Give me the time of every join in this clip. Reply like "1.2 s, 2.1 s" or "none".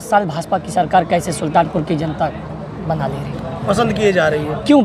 none